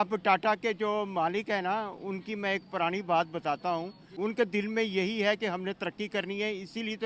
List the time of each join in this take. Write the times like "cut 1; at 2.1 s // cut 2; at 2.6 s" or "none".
cut 1; at 4.1 s